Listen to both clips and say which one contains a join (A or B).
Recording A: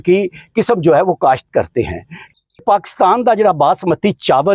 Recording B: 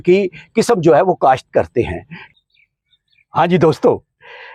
A